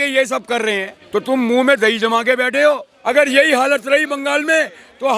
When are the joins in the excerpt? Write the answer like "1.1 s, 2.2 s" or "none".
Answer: 0.9 s, 2.9 s